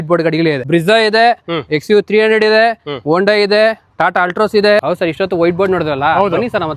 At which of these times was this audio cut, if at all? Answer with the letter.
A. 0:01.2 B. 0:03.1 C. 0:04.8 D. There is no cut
C